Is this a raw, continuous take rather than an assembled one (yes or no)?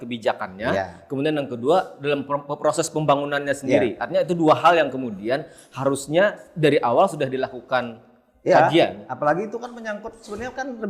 yes